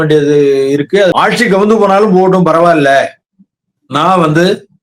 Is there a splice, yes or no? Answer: yes